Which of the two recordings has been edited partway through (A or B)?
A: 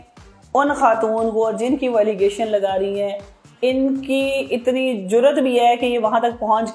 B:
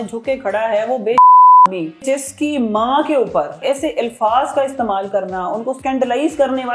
B